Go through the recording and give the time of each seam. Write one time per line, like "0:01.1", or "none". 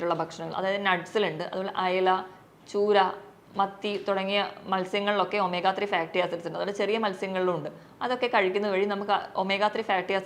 none